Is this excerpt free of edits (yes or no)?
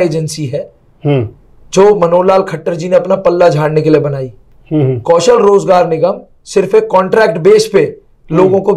yes